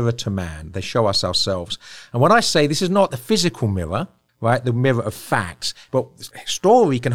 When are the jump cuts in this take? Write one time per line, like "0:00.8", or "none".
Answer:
0:03.1
0:04.2
0:05.9